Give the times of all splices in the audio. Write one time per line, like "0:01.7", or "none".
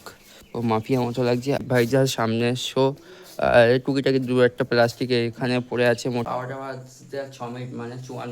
0:01.6
0:06.2